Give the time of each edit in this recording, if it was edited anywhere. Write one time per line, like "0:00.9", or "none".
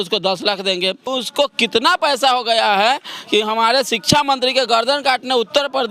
0:01.1